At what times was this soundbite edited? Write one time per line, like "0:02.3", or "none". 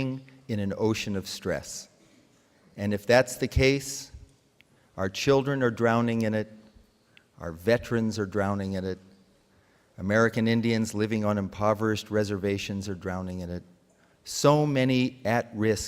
0:12.3